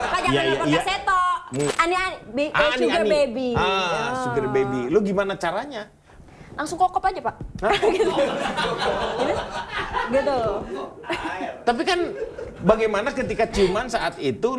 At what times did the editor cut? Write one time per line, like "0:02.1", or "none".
0:01.7